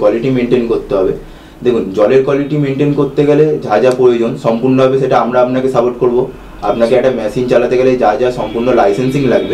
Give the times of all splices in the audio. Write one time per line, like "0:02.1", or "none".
none